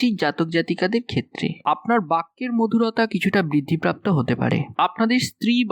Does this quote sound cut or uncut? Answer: cut